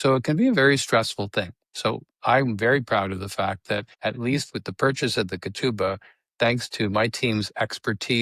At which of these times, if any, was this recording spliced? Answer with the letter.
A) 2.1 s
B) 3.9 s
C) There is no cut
B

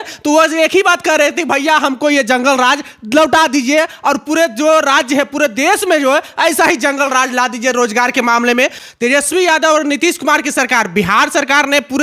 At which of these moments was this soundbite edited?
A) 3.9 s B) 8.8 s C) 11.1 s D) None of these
B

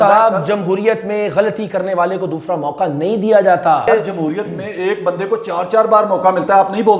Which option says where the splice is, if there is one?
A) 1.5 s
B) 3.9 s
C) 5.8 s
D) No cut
B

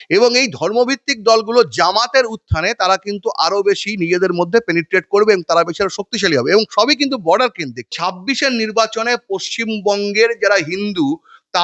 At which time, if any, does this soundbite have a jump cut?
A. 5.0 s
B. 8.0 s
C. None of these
B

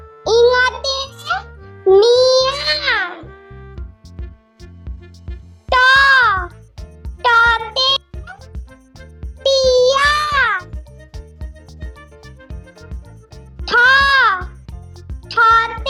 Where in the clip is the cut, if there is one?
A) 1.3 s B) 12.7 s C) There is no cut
C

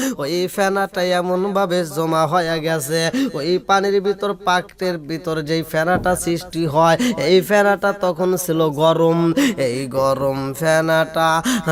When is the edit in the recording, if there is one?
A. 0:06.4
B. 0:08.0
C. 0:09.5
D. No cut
D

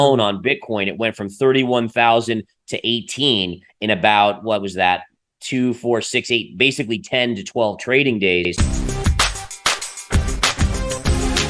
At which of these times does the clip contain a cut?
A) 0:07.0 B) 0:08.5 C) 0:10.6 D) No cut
B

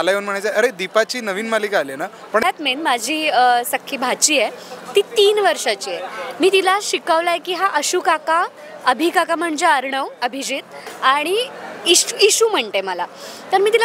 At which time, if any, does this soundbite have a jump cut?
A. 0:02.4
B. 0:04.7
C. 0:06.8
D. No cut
A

